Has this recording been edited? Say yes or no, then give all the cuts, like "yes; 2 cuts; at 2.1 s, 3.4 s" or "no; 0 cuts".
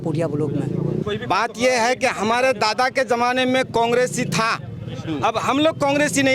yes; 1 cut; at 1.0 s